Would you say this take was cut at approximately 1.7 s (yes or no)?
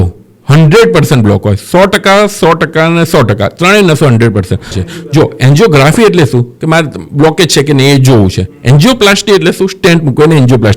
no